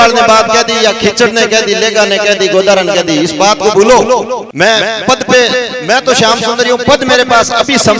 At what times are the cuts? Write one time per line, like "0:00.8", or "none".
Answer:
0:04.5